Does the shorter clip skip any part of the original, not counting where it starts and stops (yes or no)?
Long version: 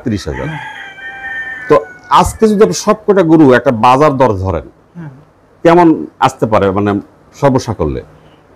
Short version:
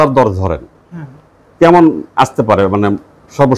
no